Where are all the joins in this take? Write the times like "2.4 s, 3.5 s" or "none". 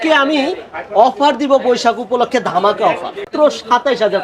3.3 s